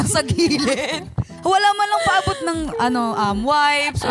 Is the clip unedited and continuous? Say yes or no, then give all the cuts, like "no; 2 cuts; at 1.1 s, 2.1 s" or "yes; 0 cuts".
no; 1 cut; at 1.3 s